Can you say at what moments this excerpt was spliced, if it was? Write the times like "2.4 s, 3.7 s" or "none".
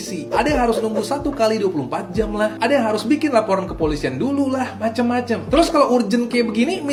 none